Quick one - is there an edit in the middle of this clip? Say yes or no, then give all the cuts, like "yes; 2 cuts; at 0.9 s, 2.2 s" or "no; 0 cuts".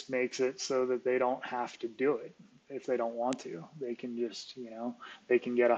no; 0 cuts